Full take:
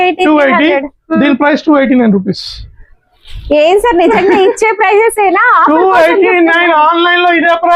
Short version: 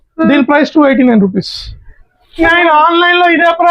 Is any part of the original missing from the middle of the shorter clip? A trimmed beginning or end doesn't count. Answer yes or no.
yes